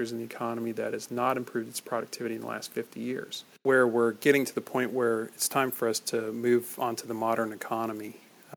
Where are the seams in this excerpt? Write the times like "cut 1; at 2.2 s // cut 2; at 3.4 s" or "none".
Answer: cut 1; at 3.5 s